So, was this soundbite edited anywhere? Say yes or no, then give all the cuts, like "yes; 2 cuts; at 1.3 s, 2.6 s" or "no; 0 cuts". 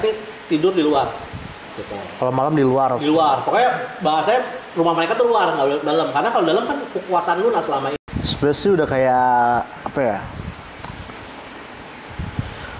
yes; 1 cut; at 8.0 s